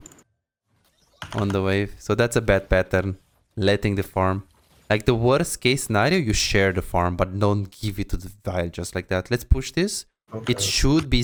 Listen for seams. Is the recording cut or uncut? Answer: uncut